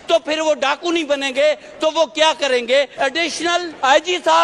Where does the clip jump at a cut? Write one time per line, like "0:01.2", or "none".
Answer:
0:03.4